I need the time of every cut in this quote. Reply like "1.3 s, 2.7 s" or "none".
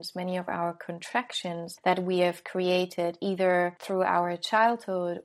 1.7 s, 3.8 s